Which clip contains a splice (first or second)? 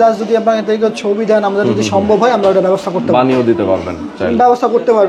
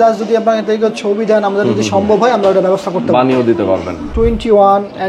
second